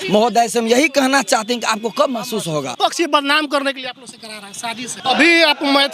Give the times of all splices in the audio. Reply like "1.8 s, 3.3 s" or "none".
2.7 s, 4.9 s